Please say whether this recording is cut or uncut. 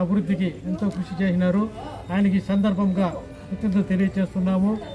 uncut